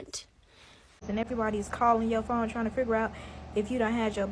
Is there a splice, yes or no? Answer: yes